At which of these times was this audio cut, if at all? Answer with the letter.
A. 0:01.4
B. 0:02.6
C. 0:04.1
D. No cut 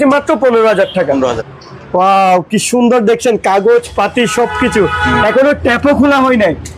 A